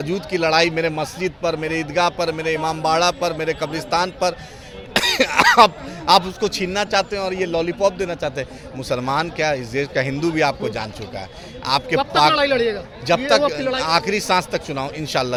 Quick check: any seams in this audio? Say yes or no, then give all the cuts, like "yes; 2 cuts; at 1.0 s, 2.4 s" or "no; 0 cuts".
no; 0 cuts